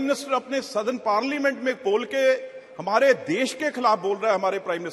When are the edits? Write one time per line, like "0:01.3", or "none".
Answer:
none